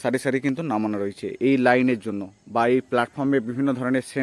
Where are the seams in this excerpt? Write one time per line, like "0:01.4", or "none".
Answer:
none